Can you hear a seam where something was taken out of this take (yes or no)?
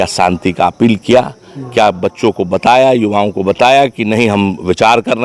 no